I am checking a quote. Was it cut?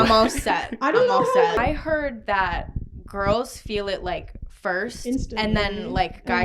yes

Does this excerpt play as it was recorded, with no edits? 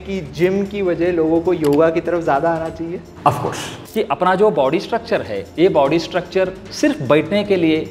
no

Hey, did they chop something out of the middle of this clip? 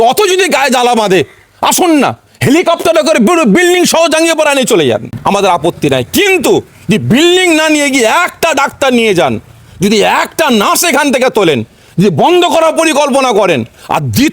yes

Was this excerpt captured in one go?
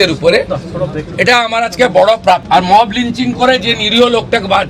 no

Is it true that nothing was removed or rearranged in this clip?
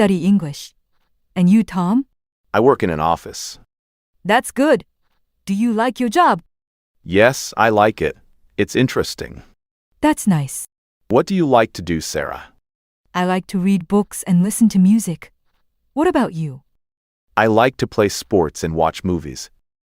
yes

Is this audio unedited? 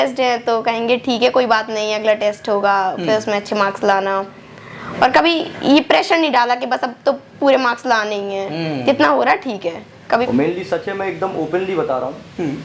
no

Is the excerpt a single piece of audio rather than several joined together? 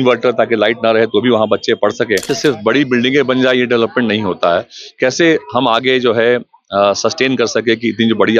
no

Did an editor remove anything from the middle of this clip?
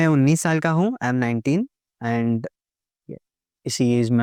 no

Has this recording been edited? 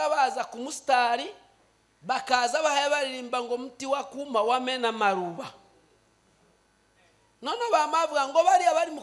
no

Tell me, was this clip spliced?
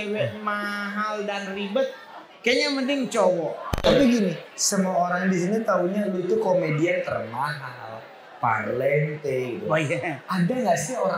yes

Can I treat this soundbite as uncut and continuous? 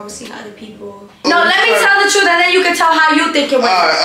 no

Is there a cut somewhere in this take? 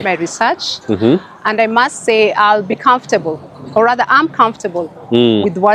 no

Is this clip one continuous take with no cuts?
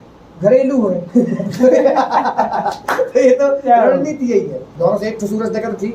no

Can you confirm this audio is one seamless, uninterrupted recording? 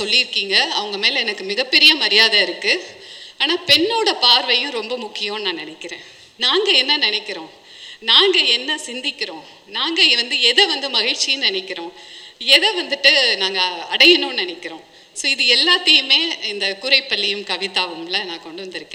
yes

